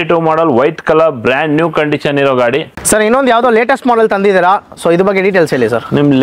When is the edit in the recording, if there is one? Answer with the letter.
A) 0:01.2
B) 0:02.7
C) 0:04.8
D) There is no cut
B